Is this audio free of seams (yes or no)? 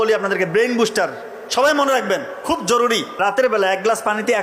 no